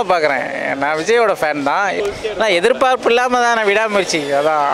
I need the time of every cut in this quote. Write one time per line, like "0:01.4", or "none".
0:02.0